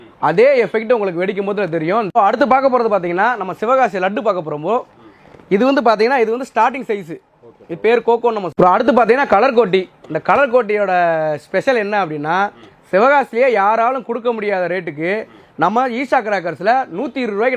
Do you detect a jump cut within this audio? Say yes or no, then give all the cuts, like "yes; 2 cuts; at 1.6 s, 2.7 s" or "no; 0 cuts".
yes; 2 cuts; at 2.1 s, 8.5 s